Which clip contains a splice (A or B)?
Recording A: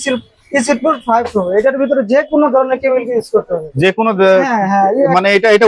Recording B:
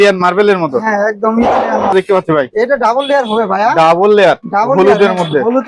B